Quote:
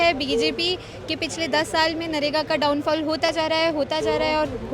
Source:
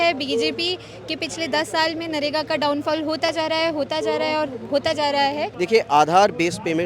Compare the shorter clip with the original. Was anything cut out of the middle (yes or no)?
no